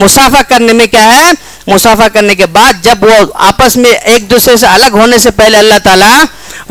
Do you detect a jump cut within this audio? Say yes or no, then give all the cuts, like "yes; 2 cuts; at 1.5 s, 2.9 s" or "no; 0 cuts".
no; 0 cuts